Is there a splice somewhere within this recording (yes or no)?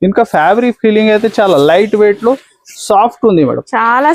no